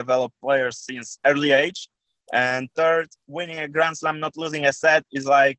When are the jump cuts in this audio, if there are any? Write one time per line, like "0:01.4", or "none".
0:02.0